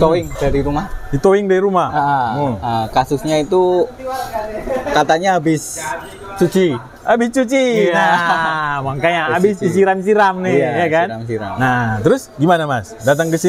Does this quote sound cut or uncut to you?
uncut